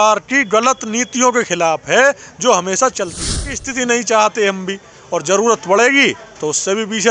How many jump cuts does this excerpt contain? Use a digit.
1